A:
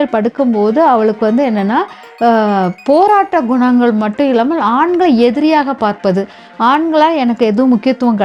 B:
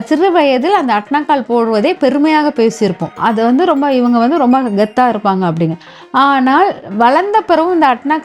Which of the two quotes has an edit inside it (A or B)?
B